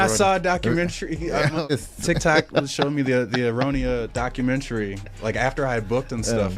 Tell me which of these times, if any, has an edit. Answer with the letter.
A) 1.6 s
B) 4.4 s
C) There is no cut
A